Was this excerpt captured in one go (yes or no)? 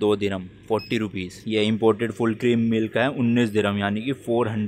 no